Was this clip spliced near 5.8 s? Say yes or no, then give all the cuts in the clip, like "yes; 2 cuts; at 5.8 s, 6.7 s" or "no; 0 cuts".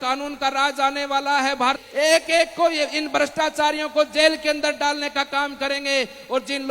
no; 1 cut; at 1.8 s